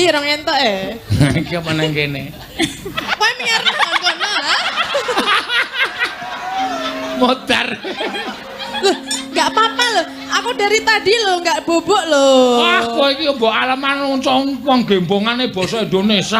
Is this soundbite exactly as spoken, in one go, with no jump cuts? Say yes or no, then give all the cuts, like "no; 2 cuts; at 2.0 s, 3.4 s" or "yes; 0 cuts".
no; 1 cut; at 3.0 s